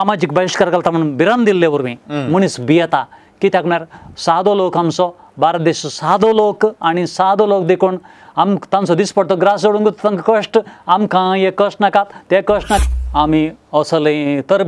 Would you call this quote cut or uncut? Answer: cut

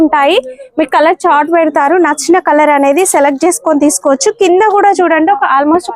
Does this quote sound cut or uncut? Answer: uncut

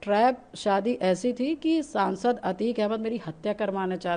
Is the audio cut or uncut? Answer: uncut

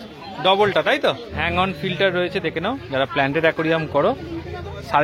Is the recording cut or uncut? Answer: cut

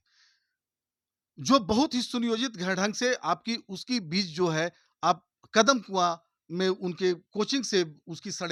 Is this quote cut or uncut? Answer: uncut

